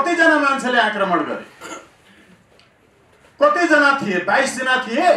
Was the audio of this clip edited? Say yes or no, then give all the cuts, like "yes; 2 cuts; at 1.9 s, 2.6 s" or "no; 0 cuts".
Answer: no; 0 cuts